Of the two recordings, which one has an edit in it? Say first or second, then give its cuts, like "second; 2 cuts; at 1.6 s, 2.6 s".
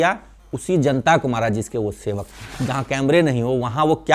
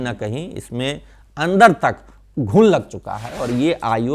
first; 1 cut; at 2.5 s